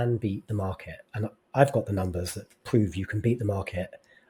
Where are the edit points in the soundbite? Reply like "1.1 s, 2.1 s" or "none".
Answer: none

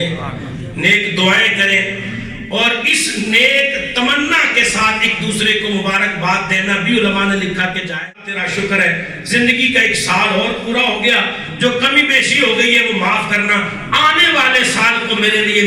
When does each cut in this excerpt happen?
8.1 s

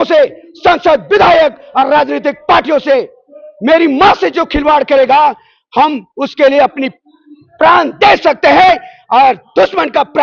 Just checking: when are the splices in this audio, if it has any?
none

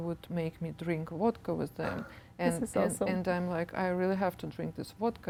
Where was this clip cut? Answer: none

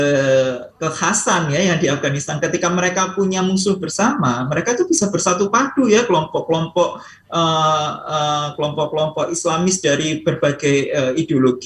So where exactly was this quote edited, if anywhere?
none

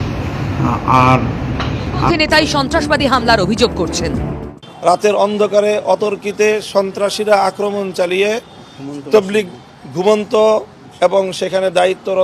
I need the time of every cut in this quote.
2.1 s

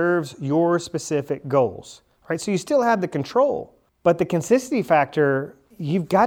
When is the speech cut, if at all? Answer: none

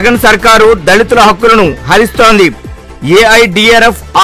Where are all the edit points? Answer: none

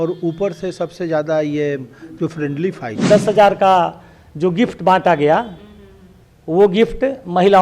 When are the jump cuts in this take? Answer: 3.1 s

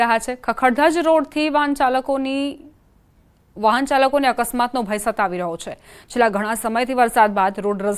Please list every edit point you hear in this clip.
2.4 s

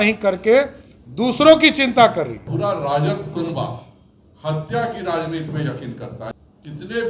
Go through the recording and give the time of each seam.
2.4 s, 6.3 s

